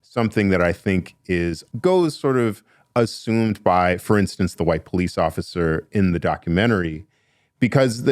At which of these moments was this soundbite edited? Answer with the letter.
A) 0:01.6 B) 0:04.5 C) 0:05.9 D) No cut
A